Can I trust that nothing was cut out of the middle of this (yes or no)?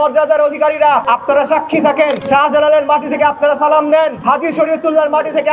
no